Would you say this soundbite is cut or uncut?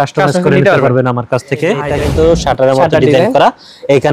cut